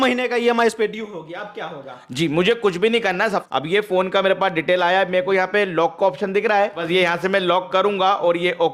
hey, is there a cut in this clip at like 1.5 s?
no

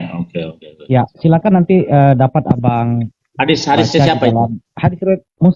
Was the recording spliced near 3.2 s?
no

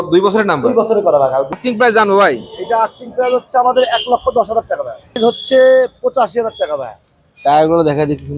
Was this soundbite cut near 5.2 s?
yes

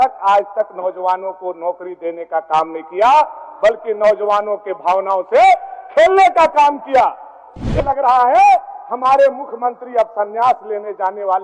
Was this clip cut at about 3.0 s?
no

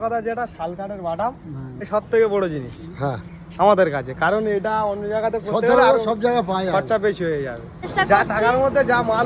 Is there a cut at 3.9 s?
no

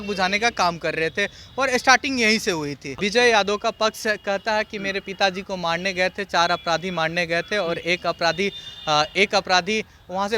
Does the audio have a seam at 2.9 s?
yes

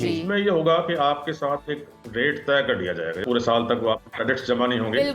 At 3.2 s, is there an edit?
yes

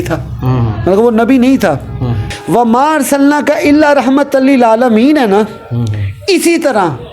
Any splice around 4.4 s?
no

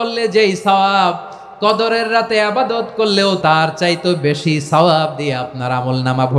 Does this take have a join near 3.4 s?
yes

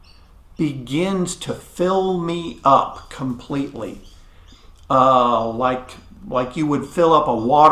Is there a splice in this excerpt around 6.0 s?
no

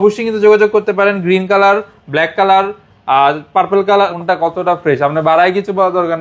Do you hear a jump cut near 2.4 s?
no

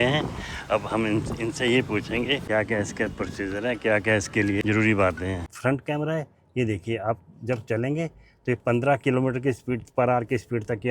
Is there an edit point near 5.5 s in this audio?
yes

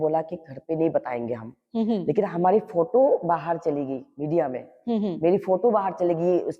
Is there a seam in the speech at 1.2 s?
no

